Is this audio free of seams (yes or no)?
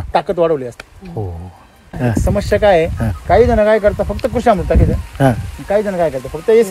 no